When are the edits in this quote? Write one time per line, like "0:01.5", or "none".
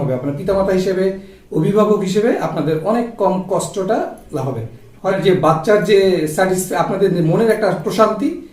0:05.1